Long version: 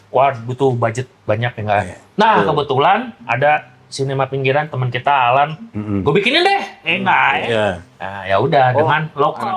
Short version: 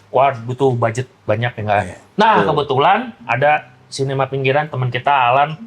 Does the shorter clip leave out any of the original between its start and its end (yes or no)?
no